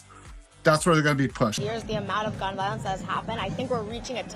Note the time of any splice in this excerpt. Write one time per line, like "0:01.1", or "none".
0:01.6